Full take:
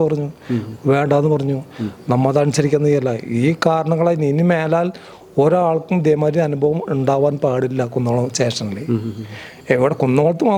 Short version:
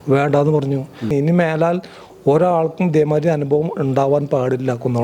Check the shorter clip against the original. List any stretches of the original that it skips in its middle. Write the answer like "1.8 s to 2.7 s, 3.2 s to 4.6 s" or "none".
1.9 s to 4.2 s